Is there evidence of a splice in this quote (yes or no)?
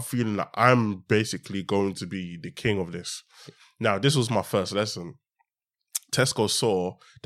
no